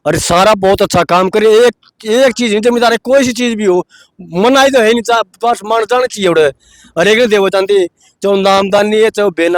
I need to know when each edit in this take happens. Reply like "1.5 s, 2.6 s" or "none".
none

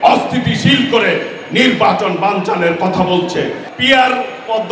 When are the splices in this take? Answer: 3.6 s

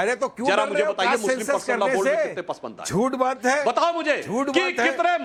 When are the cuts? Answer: none

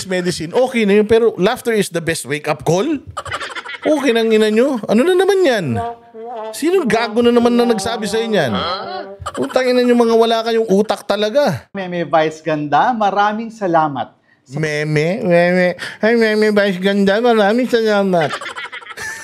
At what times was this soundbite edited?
none

